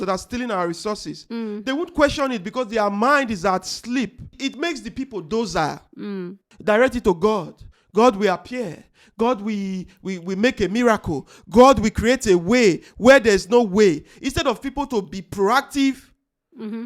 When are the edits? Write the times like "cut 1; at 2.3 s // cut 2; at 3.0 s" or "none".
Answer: cut 1; at 4.3 s // cut 2; at 6.5 s